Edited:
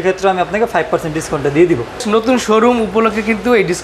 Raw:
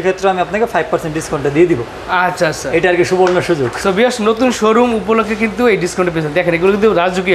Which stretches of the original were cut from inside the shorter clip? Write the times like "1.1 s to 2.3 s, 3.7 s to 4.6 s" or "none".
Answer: 2.0 s to 4.2 s